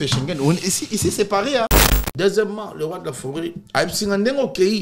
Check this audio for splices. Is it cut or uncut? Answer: cut